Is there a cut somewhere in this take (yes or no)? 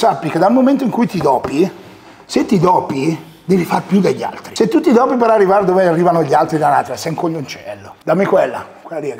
yes